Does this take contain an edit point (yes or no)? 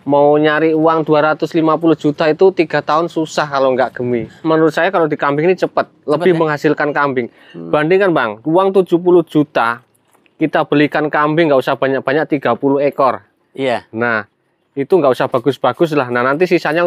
yes